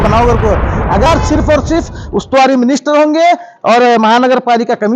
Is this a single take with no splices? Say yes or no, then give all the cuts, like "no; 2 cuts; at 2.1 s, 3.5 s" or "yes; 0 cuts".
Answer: no; 1 cut; at 1.1 s